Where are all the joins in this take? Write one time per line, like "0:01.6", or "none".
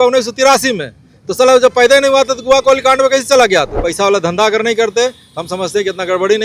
0:03.8